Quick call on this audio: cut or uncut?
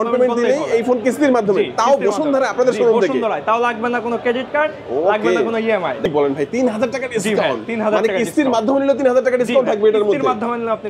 cut